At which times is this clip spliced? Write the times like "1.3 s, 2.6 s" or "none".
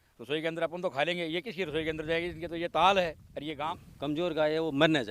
3.6 s